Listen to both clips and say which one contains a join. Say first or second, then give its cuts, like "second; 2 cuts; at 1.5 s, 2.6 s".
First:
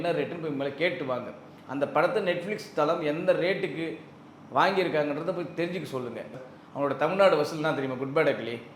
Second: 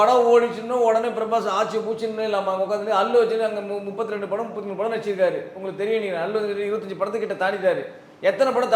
first; 1 cut; at 6.3 s